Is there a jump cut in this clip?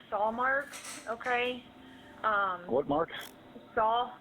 no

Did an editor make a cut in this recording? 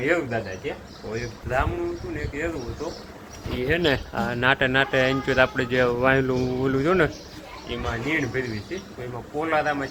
no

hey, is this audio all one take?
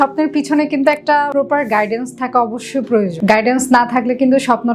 no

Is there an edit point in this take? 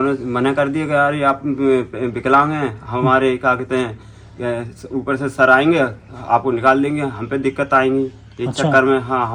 no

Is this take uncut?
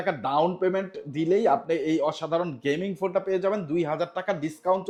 yes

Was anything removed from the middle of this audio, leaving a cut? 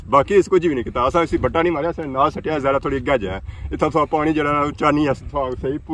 no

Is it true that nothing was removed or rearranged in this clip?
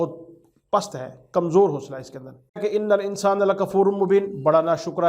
no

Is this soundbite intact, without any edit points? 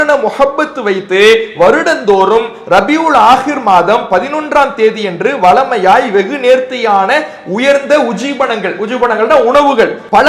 yes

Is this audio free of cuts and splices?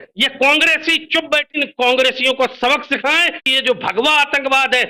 no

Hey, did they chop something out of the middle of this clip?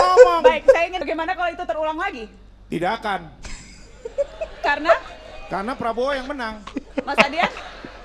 yes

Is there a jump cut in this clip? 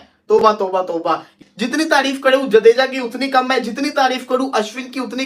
yes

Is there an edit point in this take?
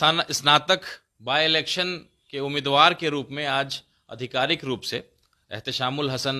no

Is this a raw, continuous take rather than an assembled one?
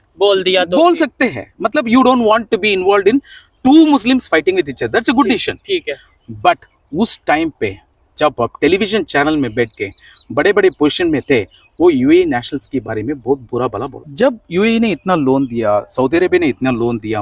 no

